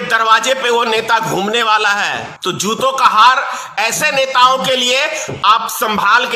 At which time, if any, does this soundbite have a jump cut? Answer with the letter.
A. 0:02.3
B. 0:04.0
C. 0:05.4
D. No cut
A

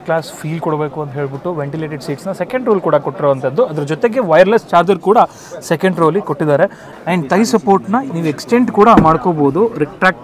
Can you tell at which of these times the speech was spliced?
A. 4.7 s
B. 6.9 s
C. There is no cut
B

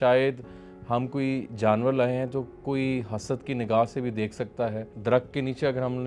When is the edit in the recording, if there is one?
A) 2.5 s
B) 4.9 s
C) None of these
B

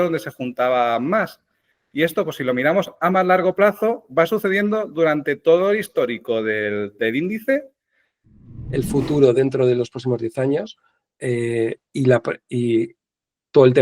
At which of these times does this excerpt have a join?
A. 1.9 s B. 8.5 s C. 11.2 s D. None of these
B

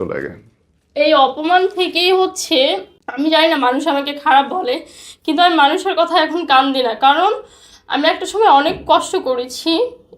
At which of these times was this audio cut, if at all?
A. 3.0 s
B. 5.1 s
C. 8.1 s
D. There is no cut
A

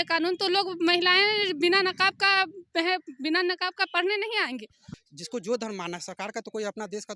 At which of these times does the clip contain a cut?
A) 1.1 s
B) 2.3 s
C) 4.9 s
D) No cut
C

